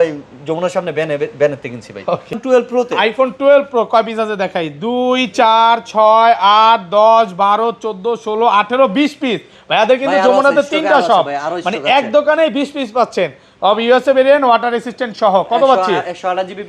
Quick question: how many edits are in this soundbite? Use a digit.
1